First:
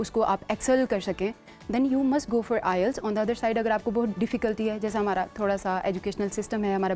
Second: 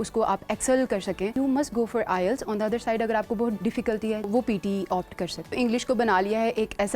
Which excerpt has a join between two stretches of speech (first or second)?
second